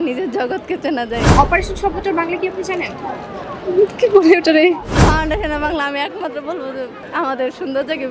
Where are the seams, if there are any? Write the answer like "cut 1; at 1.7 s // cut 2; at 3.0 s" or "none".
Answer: cut 1; at 1.3 s // cut 2; at 4.9 s // cut 3; at 7.0 s